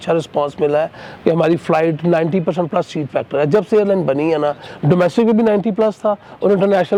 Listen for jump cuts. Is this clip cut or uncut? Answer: uncut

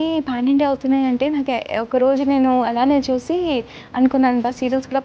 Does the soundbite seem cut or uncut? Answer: uncut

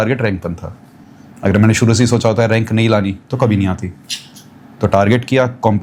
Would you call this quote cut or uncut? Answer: uncut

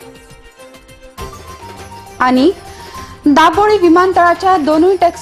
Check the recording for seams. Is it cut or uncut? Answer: cut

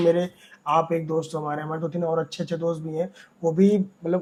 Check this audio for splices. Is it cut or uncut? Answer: uncut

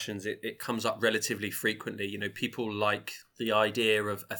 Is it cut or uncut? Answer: cut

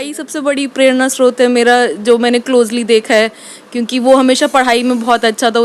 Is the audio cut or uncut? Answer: uncut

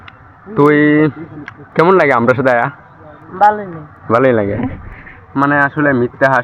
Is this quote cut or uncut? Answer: uncut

